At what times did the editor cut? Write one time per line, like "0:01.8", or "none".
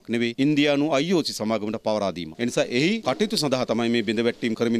0:02.3